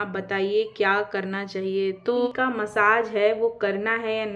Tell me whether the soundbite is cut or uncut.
cut